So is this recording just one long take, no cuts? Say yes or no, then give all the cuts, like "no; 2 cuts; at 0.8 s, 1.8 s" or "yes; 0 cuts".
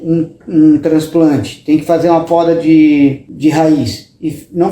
no; 1 cut; at 3.3 s